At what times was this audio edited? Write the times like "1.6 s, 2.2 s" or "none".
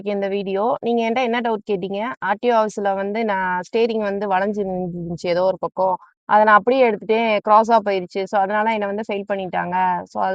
none